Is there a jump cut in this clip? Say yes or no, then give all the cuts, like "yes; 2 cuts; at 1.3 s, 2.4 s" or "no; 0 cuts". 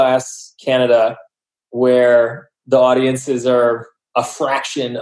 no; 0 cuts